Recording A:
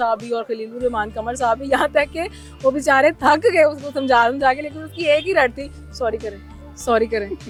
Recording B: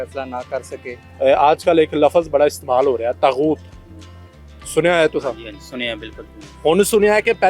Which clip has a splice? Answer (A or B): B